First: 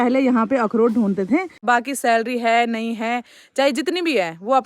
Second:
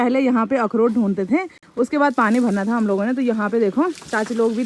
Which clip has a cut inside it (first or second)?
first